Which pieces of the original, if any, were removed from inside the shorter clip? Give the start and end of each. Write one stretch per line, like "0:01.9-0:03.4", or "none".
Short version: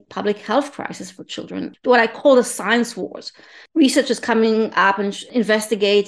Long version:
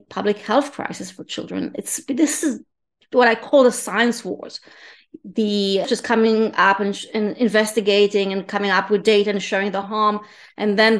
0:01.7-0:03.0
0:05.2-0:05.8
0:07.1-0:07.3